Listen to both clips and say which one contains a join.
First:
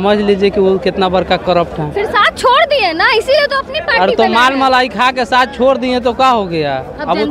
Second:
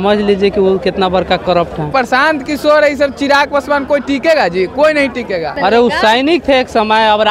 second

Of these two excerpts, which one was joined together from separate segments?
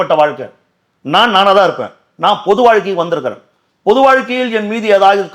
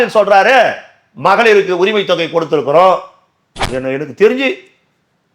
second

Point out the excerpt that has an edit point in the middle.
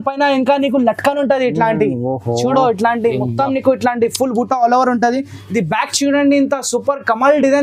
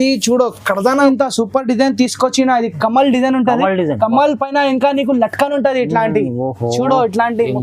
second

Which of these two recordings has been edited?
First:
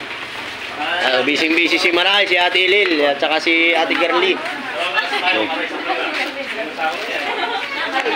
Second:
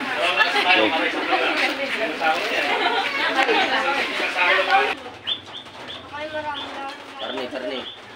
second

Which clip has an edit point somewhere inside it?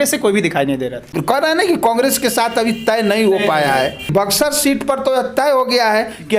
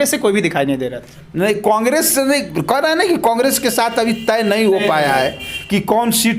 first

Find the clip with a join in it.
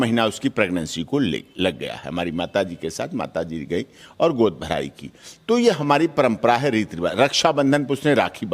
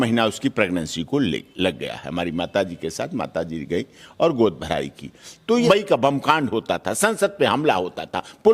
second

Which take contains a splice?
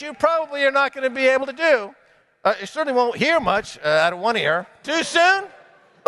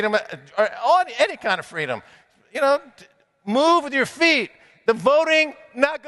first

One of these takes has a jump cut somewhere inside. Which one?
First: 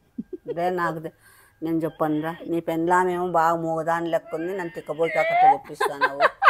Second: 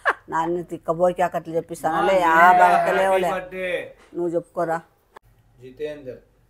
second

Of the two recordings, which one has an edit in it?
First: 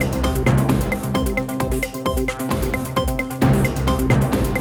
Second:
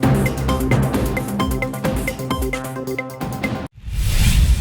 second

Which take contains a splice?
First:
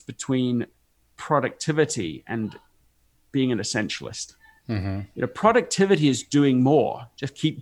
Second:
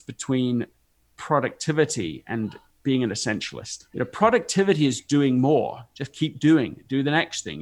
second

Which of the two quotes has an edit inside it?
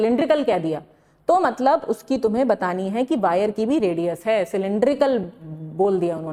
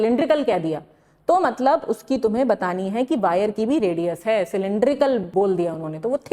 second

